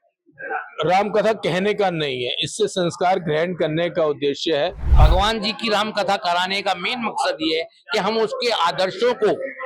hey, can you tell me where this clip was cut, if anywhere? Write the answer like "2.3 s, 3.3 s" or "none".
4.8 s